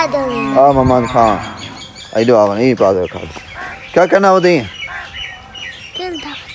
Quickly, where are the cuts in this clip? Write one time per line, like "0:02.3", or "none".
none